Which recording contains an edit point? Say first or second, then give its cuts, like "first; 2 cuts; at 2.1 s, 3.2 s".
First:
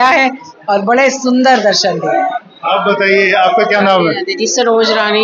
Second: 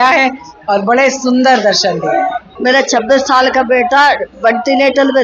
second; 1 cut; at 2.5 s